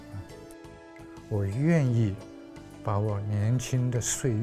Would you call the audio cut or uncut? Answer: cut